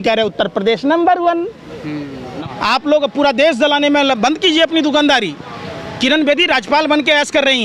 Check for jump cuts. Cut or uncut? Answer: cut